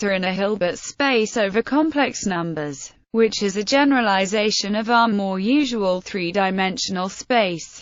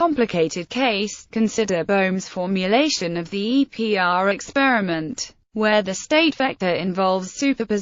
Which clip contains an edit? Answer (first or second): second